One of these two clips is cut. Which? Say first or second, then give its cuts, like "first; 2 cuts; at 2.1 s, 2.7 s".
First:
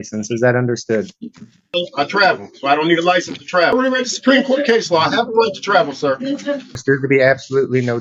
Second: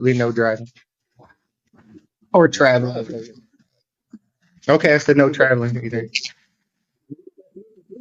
first; 3 cuts; at 1.7 s, 3.7 s, 6.7 s